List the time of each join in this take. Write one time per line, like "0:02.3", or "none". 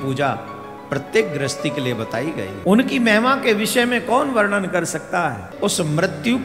0:02.5
0:05.5